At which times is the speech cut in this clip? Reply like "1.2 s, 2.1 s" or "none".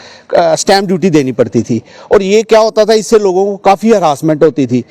none